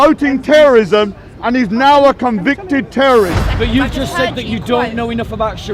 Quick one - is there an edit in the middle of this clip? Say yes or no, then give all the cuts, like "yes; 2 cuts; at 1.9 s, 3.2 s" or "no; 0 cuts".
yes; 1 cut; at 3.4 s